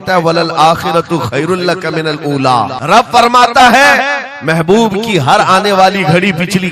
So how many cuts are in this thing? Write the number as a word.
one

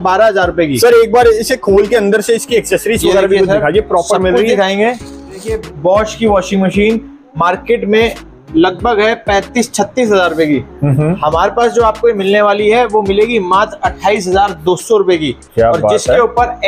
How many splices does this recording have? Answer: one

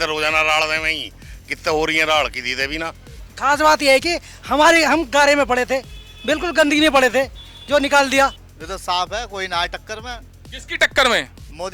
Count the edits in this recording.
two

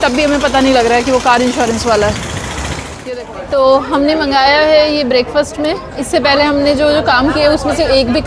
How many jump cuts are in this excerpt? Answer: one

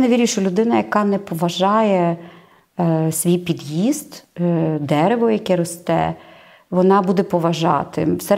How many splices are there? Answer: zero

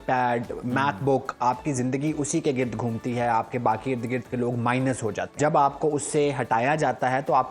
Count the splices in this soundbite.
one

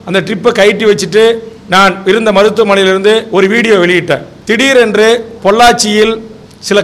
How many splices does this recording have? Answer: one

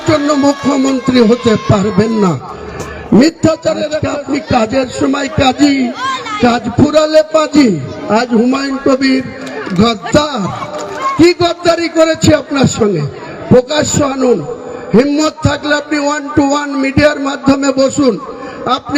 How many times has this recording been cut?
one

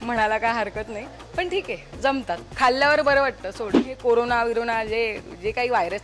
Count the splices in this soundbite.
one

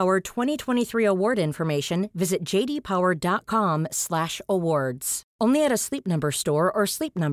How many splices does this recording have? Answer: zero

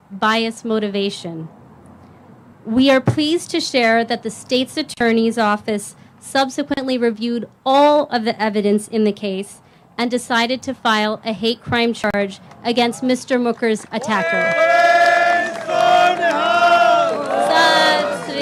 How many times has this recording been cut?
zero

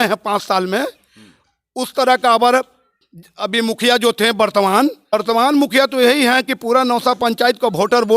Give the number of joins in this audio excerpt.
one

